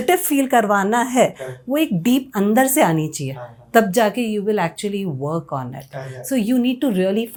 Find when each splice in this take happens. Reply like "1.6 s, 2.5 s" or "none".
none